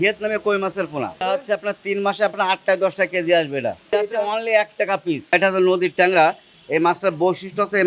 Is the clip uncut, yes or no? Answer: no